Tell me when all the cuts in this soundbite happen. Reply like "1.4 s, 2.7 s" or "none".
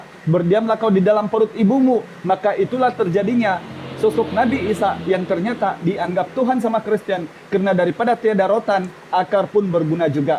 none